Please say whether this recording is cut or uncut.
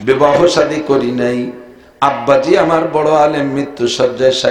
uncut